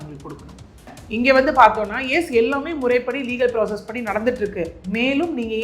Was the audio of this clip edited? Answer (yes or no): yes